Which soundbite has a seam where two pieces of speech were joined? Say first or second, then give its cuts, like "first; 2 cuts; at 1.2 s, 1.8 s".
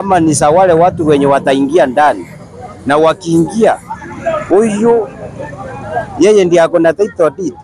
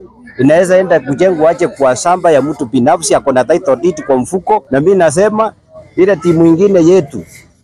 second; 1 cut; at 4.7 s